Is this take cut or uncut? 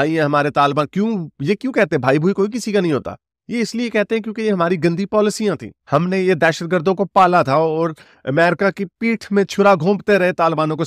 uncut